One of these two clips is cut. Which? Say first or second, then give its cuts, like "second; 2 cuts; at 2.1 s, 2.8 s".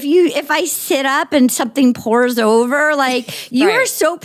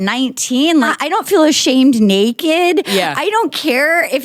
second; 1 cut; at 1.0 s